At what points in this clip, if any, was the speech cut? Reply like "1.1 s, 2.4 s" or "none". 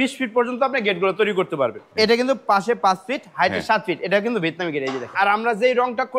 1.8 s, 5.1 s